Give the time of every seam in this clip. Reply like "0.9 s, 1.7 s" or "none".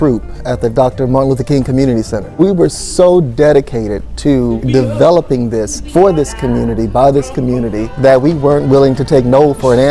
2.2 s, 4.6 s, 5.8 s, 7.8 s